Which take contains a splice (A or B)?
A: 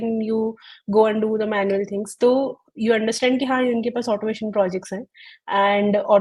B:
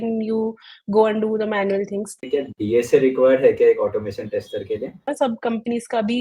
B